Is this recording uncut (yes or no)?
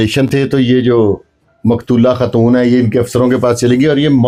yes